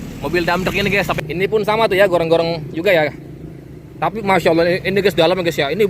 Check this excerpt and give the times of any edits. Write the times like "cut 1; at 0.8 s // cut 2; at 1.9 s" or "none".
cut 1; at 1.2 s